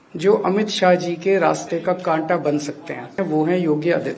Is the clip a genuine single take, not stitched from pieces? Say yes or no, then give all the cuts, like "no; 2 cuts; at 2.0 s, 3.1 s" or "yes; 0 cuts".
no; 1 cut; at 3.1 s